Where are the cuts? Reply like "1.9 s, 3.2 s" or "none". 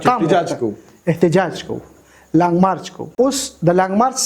3.1 s